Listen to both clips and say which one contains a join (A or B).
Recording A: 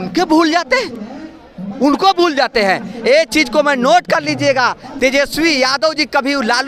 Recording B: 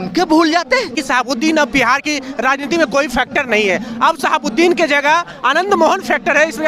B